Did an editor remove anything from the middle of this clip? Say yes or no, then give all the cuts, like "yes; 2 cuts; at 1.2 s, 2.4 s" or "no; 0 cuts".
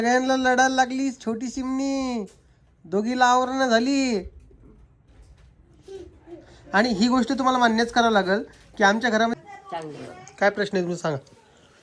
yes; 1 cut; at 9.3 s